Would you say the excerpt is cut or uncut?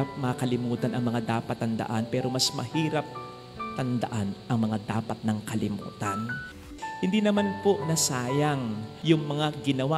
cut